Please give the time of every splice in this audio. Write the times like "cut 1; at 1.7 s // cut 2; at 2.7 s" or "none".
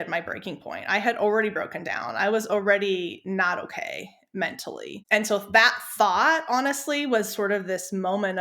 cut 1; at 4.9 s